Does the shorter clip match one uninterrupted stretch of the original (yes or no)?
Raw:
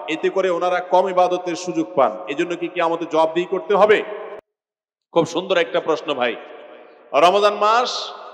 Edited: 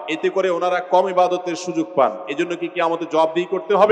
yes